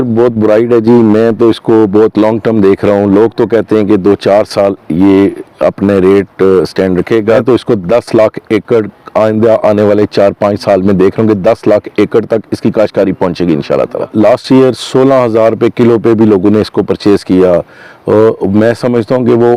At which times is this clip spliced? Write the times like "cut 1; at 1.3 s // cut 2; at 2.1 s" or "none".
cut 1; at 7.4 s // cut 2; at 14.1 s